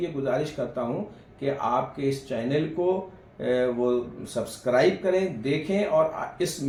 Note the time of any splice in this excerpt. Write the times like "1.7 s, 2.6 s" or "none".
none